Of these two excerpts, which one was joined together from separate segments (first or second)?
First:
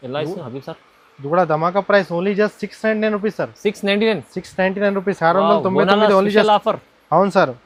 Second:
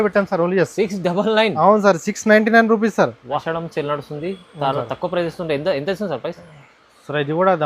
second